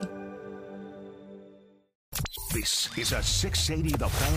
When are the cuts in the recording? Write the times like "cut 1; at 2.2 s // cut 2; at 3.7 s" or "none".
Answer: cut 1; at 2.1 s